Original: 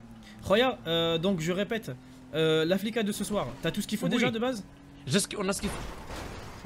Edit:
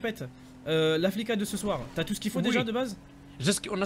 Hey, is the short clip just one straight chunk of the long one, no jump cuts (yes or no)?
yes